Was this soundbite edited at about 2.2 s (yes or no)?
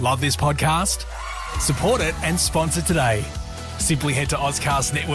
no